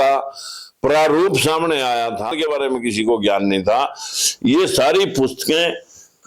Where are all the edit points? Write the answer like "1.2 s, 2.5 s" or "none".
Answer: 2.3 s